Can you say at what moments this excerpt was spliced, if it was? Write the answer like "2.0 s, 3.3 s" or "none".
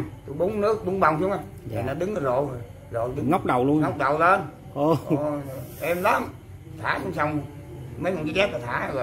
none